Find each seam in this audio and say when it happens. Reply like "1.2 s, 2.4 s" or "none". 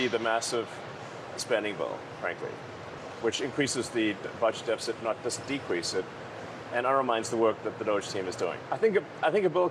8.6 s